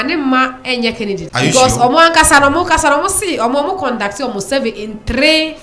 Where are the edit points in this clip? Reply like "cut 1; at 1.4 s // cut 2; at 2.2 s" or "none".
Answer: cut 1; at 1.3 s